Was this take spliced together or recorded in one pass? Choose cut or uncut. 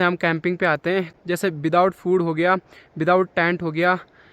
cut